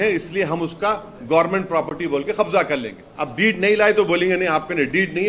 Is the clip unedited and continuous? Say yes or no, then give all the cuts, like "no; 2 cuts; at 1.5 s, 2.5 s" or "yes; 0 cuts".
no; 1 cut; at 3.0 s